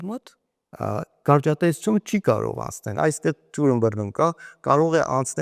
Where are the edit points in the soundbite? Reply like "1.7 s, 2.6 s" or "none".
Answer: none